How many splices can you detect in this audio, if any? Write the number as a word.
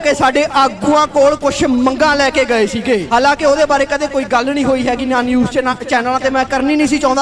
one